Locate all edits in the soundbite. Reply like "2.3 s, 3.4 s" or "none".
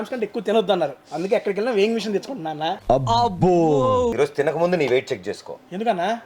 2.8 s, 4.1 s

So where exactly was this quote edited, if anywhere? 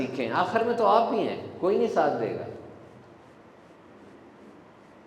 none

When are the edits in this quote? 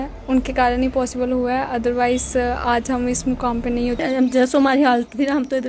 4.0 s

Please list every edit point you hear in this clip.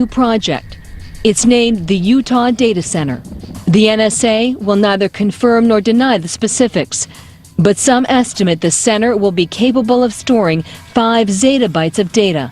9.1 s

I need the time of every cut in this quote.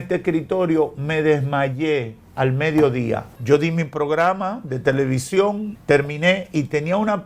3.3 s, 5.7 s

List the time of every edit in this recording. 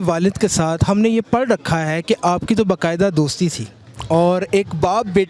none

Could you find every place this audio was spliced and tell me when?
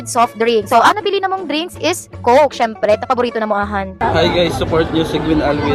none

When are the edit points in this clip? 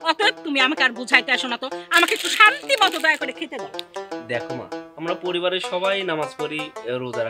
3.8 s

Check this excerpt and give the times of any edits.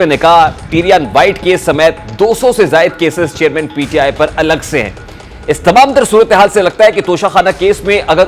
none

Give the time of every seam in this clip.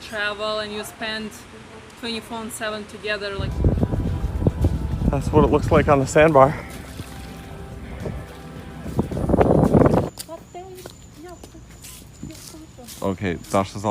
3.5 s

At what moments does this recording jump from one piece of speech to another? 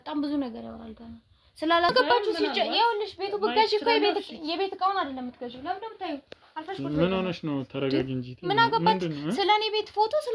1.9 s

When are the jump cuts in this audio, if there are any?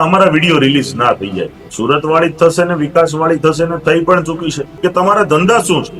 1.6 s, 4.7 s

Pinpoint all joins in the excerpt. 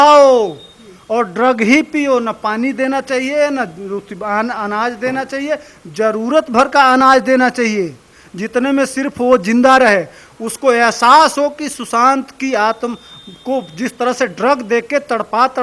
none

